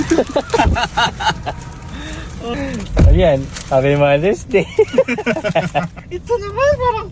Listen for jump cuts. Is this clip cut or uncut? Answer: cut